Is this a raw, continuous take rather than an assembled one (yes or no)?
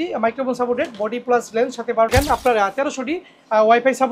no